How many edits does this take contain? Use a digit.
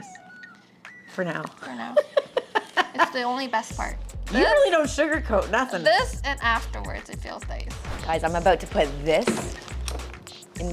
1